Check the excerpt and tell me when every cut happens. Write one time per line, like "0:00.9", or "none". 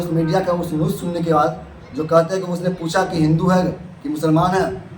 none